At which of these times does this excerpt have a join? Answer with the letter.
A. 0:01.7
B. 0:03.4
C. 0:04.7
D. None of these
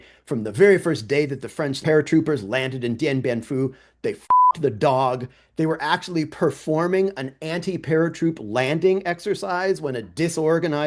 A